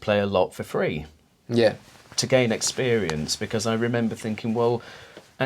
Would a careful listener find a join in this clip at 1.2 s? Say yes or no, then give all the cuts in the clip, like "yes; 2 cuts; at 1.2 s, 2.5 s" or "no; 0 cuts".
no; 0 cuts